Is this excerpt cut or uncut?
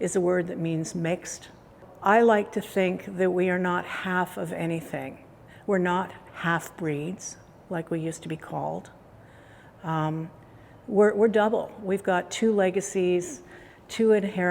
cut